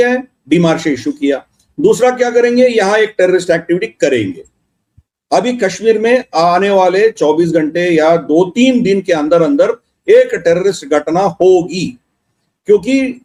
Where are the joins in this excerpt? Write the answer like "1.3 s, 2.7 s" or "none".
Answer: none